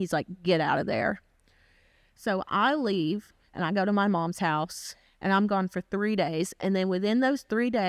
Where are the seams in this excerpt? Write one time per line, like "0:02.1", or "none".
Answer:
none